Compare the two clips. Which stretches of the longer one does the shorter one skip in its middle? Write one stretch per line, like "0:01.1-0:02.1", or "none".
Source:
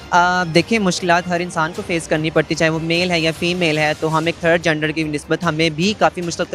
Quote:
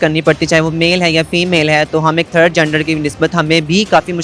none